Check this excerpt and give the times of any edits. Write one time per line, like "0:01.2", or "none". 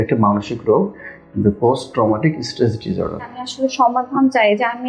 0:03.4